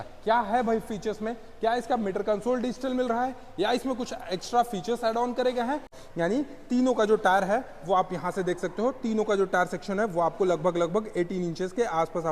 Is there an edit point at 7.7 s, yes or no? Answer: no